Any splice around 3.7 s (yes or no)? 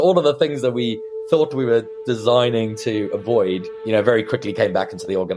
yes